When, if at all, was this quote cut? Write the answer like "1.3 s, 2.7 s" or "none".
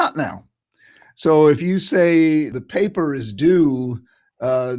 2.5 s